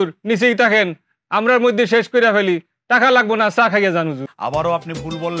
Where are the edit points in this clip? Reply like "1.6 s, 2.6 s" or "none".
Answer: 4.3 s